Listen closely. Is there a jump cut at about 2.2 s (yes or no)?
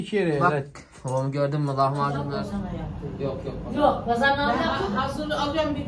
yes